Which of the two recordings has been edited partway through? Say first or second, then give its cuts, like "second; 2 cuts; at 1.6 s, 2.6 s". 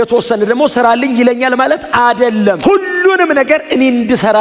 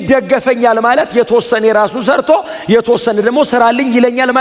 first; 1 cut; at 2.6 s